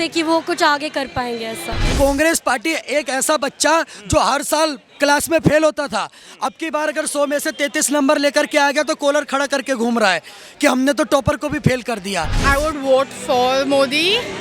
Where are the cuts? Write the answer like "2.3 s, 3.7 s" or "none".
1.8 s, 12.4 s